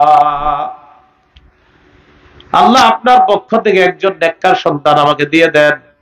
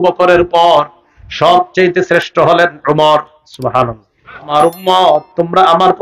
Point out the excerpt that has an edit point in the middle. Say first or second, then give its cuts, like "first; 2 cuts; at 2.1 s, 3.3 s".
second; 1 cut; at 4.5 s